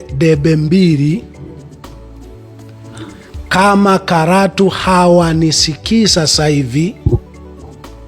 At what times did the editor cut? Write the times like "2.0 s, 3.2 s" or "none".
1.3 s, 2.8 s